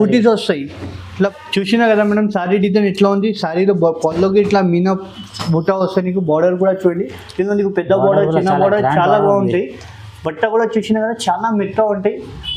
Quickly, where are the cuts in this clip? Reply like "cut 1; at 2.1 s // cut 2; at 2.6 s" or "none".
cut 1; at 1.3 s